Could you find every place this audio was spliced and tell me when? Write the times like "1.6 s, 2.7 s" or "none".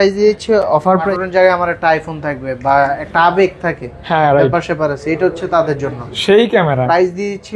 1.1 s